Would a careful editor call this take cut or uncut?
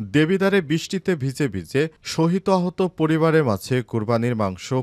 uncut